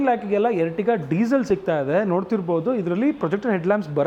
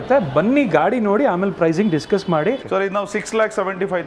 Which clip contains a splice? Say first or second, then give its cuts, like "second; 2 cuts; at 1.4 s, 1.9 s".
second; 1 cut; at 2.6 s